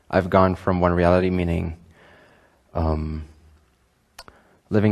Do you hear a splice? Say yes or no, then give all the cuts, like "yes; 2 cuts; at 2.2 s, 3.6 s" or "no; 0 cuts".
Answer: yes; 1 cut; at 0.9 s